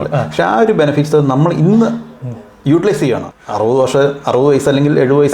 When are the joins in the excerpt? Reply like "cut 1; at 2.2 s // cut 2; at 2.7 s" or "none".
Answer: cut 1; at 3.3 s